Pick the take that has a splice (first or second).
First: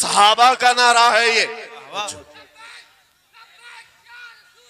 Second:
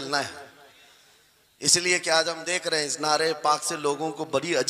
first